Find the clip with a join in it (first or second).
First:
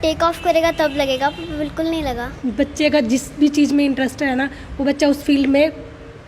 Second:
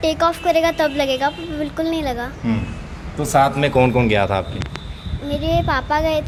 first